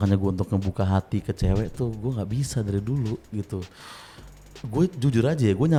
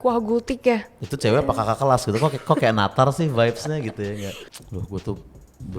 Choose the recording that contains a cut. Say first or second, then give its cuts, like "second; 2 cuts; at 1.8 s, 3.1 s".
second; 2 cuts; at 1.0 s, 4.5 s